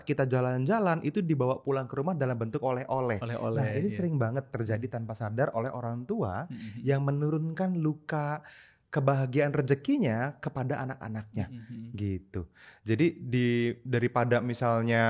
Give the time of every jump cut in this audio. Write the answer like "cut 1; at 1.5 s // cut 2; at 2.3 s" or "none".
none